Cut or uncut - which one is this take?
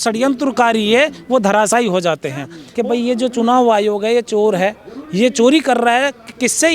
cut